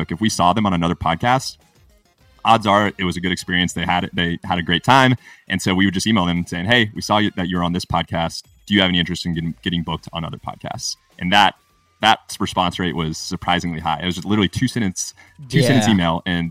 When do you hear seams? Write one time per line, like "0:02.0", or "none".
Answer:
none

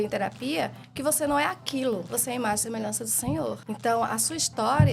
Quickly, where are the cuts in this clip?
0:02.1
0:03.6

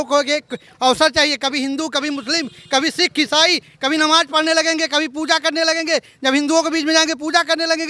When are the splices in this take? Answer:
none

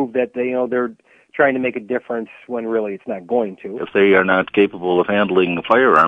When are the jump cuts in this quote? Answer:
0:03.8

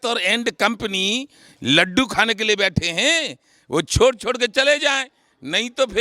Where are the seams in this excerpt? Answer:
none

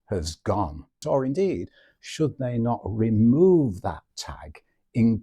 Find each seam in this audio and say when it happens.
0:00.9

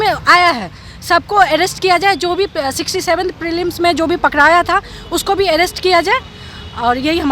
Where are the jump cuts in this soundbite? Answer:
none

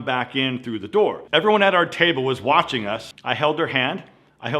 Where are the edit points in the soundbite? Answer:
0:01.2
0:03.0

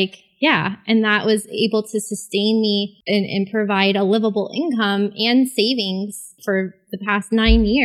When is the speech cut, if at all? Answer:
0:03.0
0:06.4

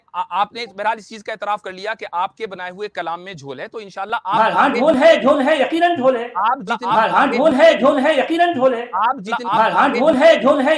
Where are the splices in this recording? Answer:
none

